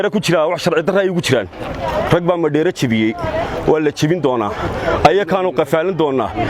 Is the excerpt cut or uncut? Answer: uncut